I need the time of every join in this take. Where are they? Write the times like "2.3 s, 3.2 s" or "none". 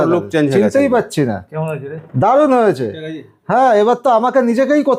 none

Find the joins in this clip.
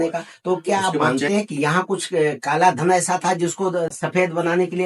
3.9 s

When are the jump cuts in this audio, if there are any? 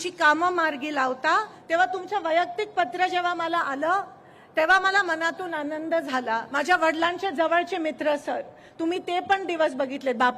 1.5 s, 6.5 s

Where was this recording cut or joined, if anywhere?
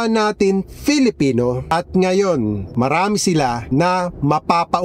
1.7 s, 2.7 s, 3.6 s

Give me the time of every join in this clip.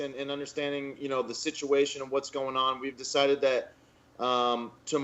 3.8 s

